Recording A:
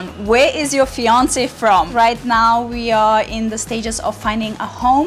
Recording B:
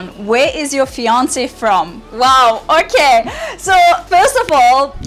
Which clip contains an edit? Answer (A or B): A